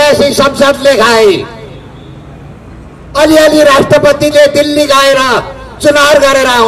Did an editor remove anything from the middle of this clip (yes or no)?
no